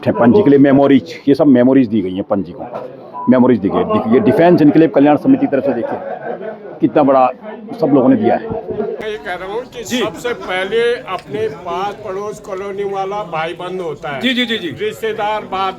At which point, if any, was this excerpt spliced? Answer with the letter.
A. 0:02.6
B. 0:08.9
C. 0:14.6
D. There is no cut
B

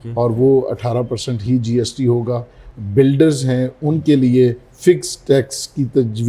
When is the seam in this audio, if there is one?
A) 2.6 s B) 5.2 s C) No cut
A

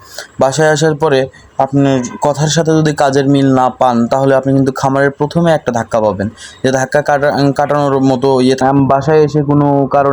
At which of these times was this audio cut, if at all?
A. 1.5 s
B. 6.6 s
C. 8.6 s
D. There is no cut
C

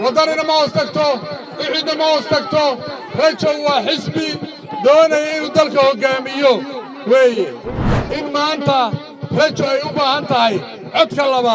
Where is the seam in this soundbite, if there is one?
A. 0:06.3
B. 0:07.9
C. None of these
B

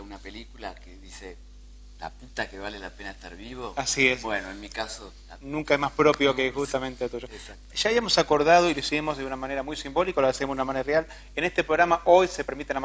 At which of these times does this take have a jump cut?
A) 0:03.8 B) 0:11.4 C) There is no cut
A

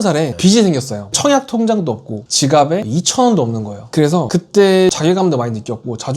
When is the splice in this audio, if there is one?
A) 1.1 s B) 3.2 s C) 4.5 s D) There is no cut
A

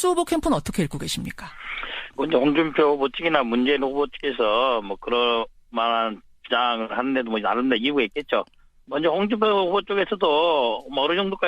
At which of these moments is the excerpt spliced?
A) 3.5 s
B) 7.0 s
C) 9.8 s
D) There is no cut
B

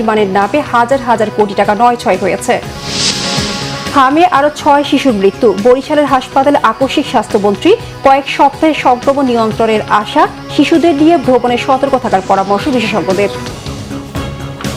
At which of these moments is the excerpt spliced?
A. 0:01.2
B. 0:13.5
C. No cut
B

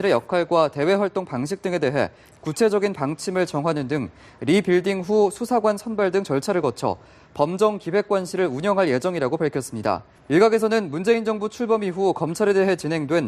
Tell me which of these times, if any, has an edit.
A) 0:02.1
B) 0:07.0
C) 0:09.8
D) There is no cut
C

